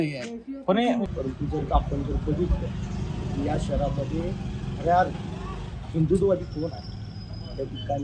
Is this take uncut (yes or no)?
no